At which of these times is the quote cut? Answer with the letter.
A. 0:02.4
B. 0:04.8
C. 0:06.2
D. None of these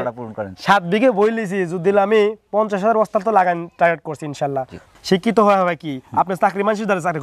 B